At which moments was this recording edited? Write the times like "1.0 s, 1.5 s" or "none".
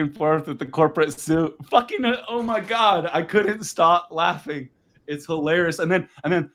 none